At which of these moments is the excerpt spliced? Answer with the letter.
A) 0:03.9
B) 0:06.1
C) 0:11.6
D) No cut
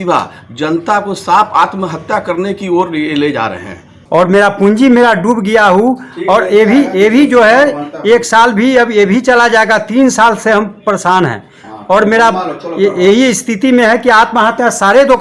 A